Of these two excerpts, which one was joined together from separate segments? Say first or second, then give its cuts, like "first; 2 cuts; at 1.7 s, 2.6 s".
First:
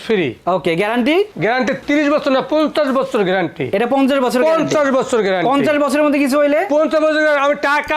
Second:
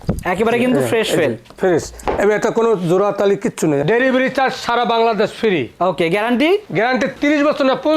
second; 1 cut; at 3.8 s